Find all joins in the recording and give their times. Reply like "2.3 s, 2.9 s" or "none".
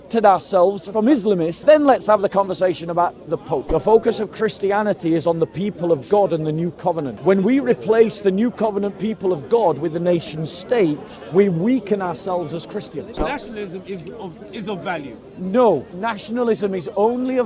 1.5 s, 3.6 s, 7.1 s, 11.1 s, 13.2 s, 15.9 s